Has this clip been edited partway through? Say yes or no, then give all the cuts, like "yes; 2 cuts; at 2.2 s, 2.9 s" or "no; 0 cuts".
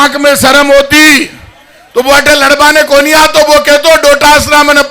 no; 0 cuts